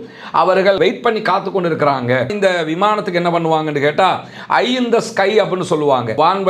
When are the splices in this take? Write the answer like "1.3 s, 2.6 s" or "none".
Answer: 2.3 s